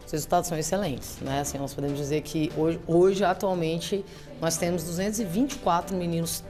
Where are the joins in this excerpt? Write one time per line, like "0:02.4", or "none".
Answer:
none